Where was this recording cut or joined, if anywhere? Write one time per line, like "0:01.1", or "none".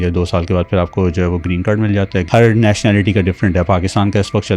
0:02.3